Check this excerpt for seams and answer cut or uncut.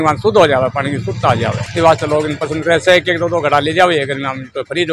uncut